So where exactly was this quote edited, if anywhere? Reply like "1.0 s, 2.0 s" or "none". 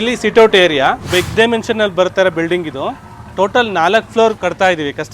1.0 s